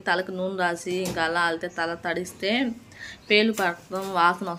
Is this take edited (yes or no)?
no